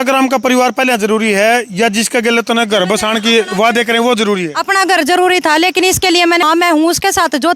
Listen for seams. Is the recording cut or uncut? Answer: cut